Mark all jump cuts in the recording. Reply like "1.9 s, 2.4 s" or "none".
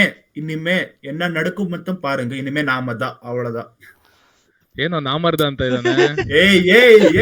none